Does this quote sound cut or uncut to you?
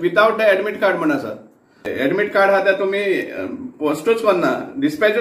cut